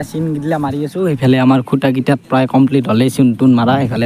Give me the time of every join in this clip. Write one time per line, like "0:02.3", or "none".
none